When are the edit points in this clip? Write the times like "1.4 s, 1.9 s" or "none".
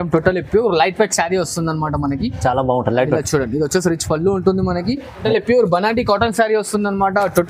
5.2 s